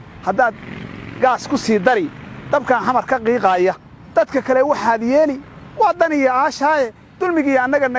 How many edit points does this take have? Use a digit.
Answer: 0